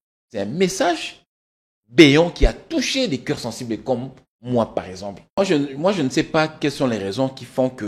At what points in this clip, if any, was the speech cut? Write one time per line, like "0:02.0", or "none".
0:05.4

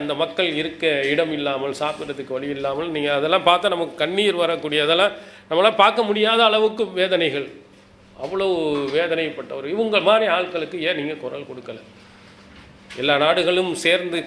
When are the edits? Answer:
none

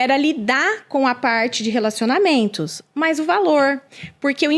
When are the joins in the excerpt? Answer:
none

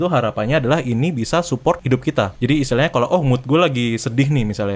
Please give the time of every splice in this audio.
0:02.0

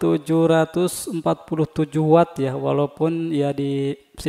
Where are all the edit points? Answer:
none

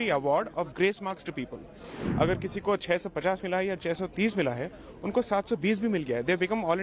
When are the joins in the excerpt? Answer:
none

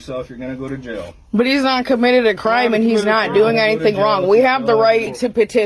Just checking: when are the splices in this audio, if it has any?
none

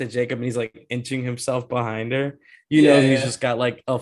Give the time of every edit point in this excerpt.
none

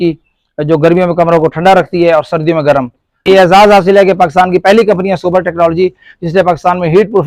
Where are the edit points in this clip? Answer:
0:03.0

